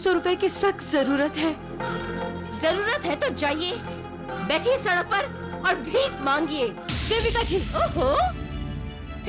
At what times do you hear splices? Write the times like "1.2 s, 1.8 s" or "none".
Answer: none